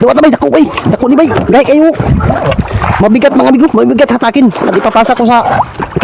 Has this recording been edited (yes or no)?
no